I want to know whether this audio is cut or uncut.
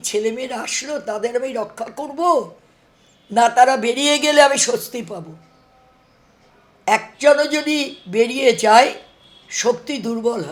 uncut